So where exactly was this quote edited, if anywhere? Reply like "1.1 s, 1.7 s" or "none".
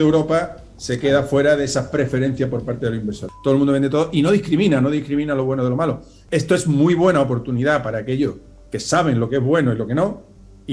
3.3 s, 6.1 s